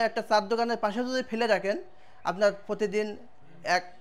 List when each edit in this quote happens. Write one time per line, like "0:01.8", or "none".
none